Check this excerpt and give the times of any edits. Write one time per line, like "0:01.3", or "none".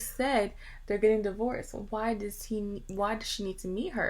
none

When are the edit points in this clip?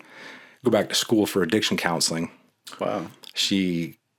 none

